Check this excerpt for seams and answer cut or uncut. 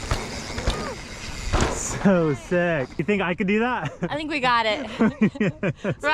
uncut